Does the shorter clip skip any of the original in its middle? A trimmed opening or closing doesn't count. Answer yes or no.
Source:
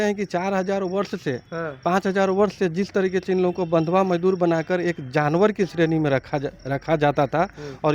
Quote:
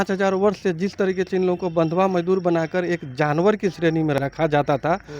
yes